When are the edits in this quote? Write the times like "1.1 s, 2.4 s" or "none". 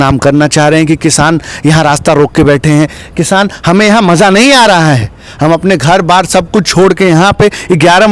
none